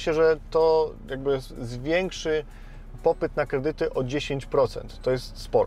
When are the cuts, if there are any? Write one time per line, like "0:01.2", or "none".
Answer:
none